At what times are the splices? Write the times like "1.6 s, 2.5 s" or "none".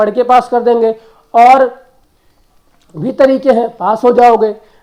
none